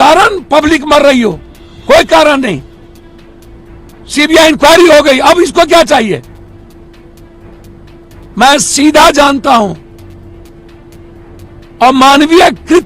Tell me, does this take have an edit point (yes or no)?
no